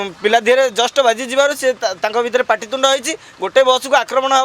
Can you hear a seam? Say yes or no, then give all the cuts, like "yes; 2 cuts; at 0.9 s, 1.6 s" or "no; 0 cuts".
no; 0 cuts